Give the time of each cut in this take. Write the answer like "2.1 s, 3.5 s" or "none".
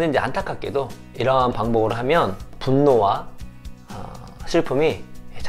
1.0 s, 2.5 s